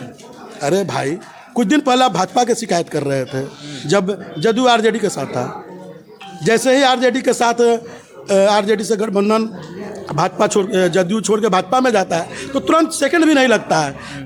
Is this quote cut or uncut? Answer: uncut